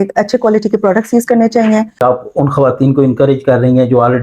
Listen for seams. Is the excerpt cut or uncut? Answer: cut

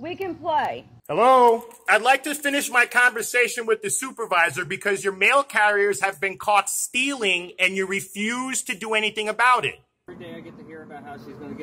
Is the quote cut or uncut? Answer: cut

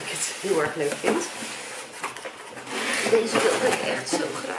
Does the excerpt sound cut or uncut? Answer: uncut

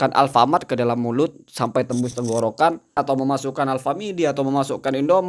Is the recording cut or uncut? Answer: cut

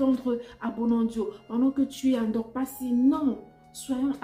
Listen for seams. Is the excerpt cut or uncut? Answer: uncut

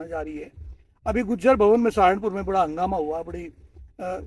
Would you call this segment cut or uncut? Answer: uncut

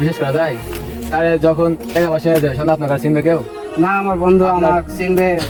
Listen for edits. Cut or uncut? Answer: uncut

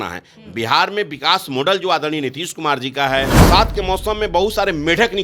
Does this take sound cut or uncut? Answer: cut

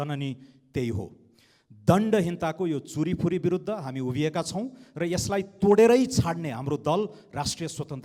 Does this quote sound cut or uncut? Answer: uncut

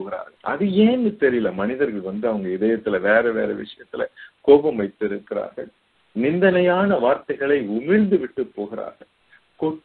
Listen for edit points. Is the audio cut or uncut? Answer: uncut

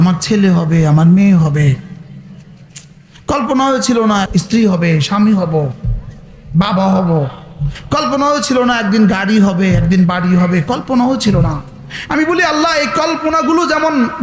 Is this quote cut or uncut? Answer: cut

